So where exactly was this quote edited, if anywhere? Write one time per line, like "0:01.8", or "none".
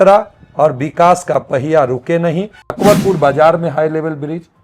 0:02.8